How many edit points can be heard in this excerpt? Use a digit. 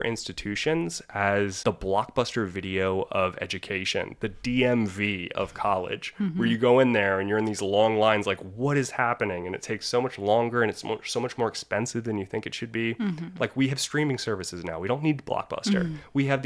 1